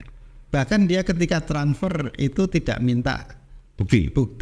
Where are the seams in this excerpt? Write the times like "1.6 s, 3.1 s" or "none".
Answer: none